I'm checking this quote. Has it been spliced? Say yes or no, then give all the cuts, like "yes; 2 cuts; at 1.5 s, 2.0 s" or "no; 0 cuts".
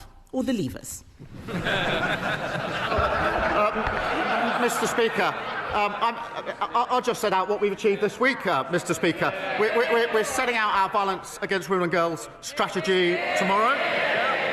no; 0 cuts